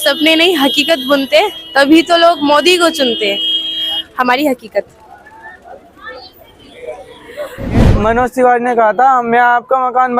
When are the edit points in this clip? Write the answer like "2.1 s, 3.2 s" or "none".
7.8 s